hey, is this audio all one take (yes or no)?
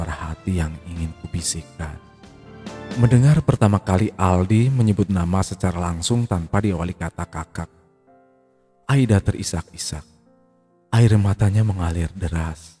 no